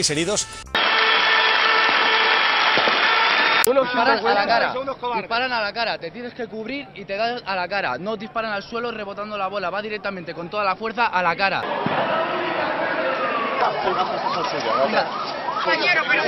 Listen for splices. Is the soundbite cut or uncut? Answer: cut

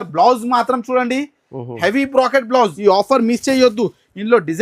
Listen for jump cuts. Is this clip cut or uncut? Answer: cut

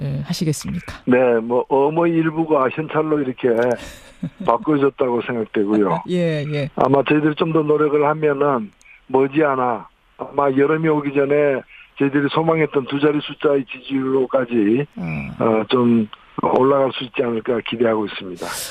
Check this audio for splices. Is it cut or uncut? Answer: uncut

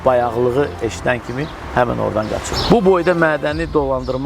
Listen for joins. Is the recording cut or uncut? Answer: cut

